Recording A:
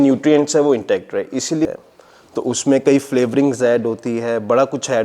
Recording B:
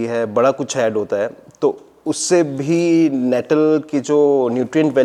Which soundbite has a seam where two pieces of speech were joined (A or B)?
A